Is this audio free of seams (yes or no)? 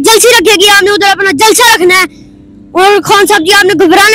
yes